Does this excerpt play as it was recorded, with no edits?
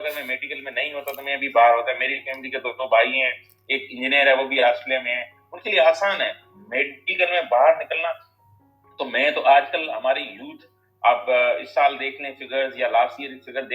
yes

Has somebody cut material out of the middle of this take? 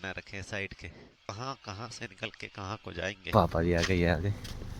yes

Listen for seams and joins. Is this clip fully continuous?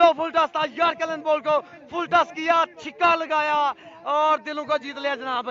yes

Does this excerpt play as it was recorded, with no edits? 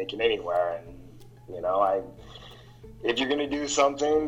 yes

